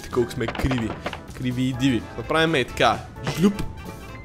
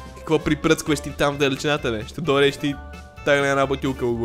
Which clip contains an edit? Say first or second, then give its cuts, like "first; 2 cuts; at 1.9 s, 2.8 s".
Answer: first; 1 cut; at 2.1 s